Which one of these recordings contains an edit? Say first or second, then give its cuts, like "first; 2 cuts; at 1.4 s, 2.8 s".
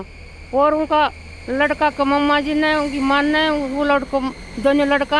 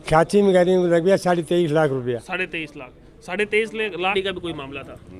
second; 1 cut; at 4.0 s